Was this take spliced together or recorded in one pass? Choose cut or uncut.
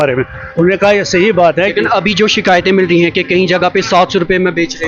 uncut